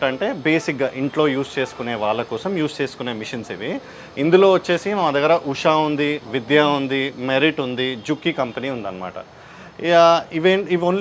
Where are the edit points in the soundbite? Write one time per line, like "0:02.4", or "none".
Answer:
none